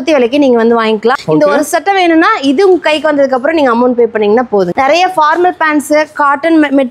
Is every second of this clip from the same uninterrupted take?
no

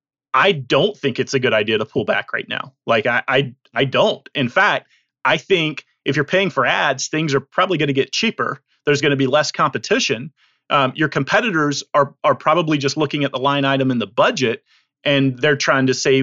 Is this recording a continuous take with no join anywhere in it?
yes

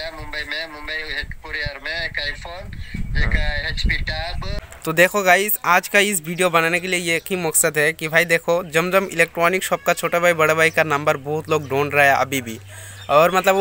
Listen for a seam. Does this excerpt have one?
yes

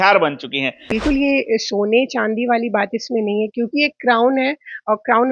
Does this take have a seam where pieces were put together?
yes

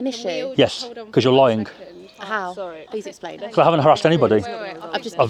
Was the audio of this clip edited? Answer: no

